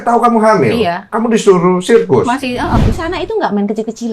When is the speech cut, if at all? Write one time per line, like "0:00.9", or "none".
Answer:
0:02.8